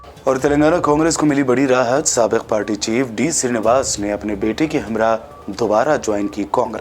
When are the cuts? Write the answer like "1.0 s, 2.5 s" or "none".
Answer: none